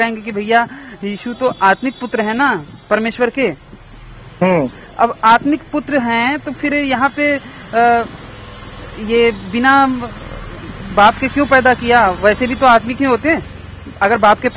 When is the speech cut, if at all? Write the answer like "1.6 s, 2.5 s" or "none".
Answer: none